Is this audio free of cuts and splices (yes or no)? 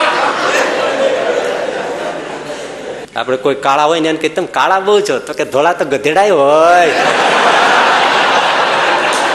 no